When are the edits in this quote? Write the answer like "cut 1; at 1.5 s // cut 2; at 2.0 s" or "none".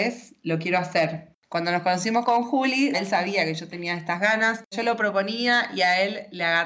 cut 1; at 1.3 s // cut 2; at 3.0 s // cut 3; at 4.7 s